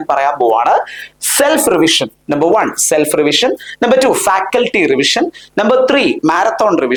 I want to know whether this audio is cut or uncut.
uncut